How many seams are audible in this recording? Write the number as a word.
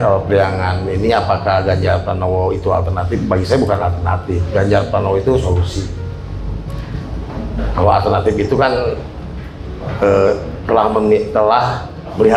zero